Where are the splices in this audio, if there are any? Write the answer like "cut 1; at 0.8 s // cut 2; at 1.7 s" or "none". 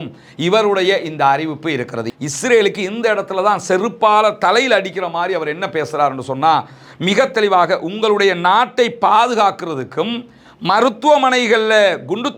cut 1; at 2.0 s